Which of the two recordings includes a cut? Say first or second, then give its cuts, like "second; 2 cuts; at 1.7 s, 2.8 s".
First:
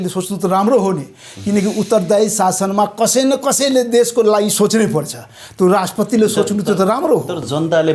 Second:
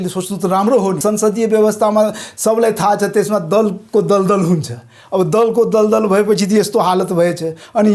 second; 1 cut; at 1.0 s